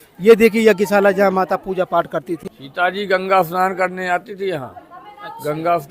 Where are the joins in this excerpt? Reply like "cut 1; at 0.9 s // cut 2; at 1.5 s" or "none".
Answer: cut 1; at 2.4 s